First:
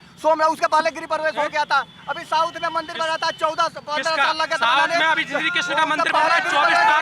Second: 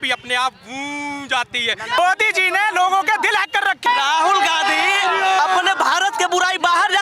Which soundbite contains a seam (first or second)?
second